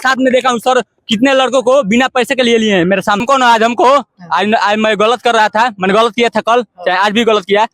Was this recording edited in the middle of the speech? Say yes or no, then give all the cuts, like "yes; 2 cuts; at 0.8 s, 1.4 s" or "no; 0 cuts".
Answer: yes; 1 cut; at 3.2 s